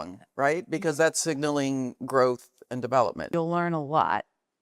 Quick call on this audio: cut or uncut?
cut